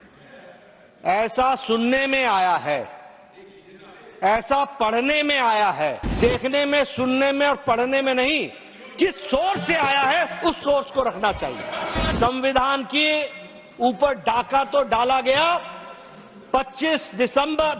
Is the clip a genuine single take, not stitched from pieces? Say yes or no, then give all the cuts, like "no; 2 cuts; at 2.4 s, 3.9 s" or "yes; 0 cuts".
no; 2 cuts; at 6.1 s, 12.1 s